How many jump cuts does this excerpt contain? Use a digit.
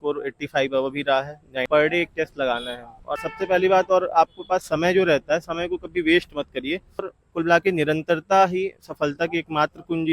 3